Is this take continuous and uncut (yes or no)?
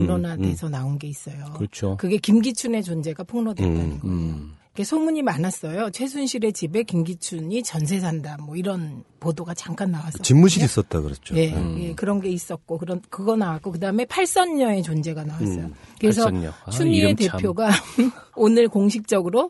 no